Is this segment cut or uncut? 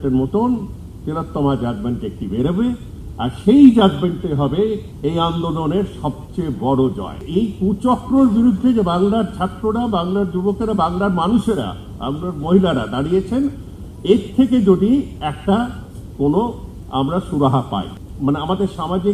cut